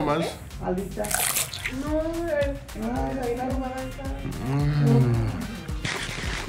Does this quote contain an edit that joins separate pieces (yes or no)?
no